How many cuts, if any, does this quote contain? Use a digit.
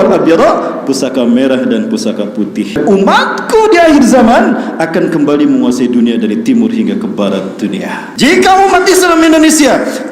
2